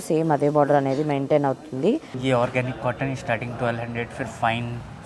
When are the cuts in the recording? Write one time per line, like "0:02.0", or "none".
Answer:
0:02.1